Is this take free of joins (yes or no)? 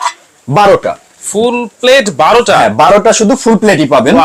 yes